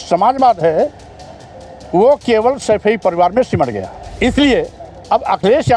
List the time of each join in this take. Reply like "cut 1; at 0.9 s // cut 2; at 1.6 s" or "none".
cut 1; at 4.0 s